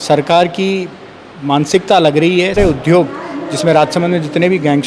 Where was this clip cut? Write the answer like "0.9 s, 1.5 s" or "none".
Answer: 2.6 s